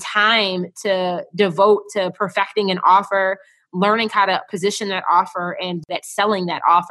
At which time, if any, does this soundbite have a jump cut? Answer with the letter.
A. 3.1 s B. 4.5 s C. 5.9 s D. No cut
C